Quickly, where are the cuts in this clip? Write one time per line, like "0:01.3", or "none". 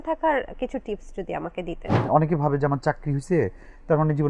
0:02.1